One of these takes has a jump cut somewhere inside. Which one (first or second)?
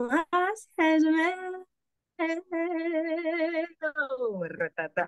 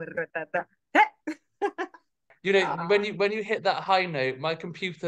second